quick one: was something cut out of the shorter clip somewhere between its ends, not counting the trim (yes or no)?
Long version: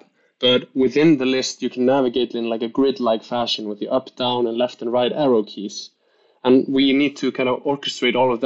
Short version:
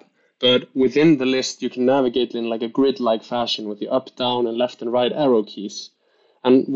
no